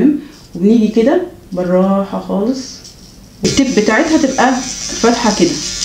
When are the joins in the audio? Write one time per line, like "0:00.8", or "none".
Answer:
0:03.4